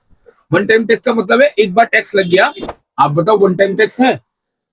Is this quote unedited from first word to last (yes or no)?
no